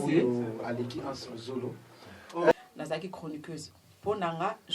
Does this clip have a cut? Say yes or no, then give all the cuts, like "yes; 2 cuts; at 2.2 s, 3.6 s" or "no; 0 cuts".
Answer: yes; 1 cut; at 2.5 s